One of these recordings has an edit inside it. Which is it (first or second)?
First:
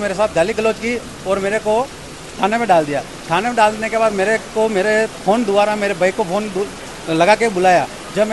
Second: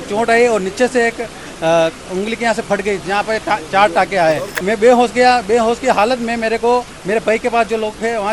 second